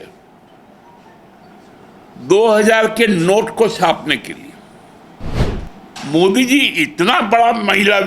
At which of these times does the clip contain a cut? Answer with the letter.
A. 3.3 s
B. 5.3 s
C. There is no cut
B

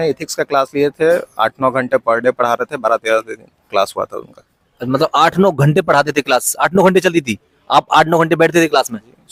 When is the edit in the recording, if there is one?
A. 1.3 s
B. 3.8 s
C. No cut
C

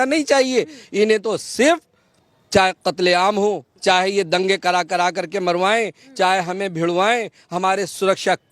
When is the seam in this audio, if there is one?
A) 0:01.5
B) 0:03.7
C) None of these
B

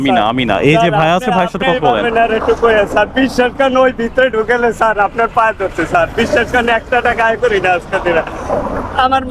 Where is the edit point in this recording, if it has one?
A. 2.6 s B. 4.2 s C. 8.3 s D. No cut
D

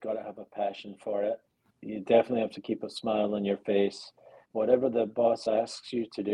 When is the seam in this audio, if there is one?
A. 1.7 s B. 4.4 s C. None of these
B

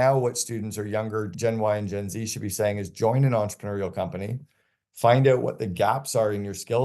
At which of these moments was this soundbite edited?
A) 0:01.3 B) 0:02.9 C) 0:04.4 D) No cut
A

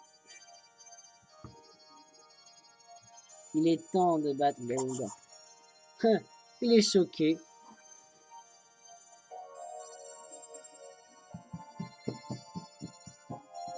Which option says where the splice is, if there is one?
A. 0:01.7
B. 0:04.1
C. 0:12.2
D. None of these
B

